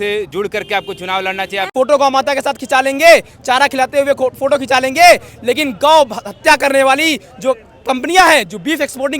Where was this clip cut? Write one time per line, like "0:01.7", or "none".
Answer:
0:01.7